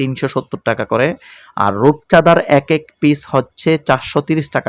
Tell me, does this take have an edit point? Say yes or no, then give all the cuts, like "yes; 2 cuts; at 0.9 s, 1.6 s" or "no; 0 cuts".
no; 0 cuts